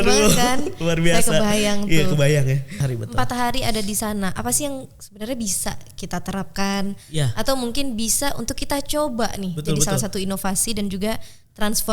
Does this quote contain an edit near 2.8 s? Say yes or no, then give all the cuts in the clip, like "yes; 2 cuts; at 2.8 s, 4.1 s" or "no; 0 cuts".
yes; 1 cut; at 2.8 s